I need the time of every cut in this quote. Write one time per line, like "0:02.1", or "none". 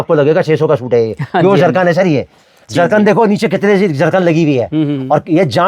none